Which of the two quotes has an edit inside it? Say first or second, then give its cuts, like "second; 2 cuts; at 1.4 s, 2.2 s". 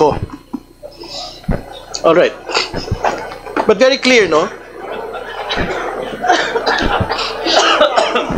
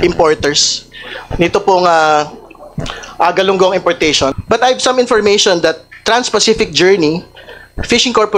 second; 1 cut; at 4.4 s